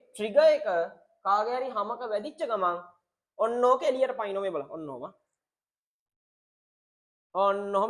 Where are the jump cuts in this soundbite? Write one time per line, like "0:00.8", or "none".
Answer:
none